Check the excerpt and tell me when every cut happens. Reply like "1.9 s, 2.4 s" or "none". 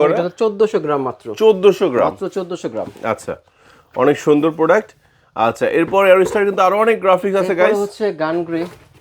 none